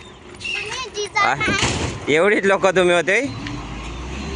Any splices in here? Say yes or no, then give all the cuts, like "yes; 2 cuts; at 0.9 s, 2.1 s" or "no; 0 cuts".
no; 0 cuts